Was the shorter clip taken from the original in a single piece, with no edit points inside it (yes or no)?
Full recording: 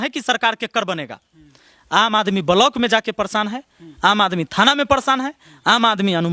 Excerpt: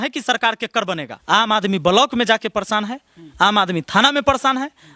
no